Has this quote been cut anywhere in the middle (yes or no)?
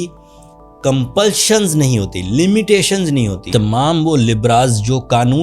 yes